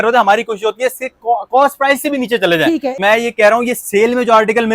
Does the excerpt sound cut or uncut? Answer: cut